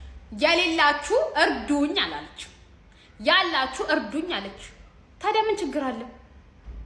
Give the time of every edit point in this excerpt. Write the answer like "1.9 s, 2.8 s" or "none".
none

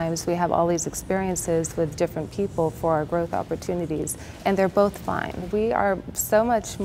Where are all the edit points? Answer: 4.2 s, 5.5 s

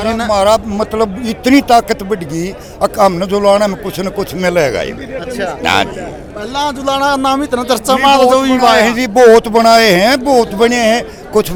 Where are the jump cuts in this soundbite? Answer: none

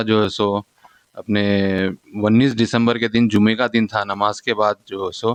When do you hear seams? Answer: none

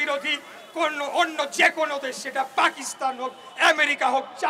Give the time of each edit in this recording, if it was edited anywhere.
none

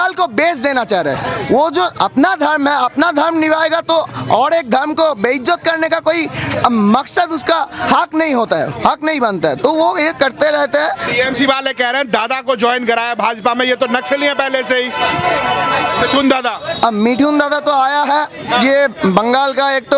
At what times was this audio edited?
none

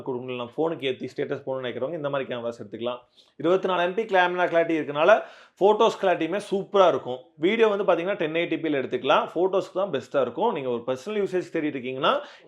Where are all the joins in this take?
none

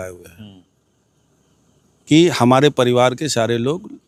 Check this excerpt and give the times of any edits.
none

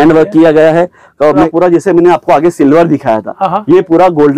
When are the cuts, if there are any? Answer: 1.5 s

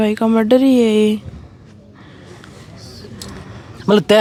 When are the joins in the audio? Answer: none

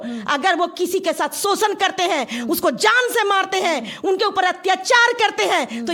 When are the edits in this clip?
none

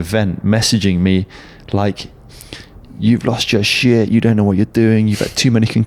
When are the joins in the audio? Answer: none

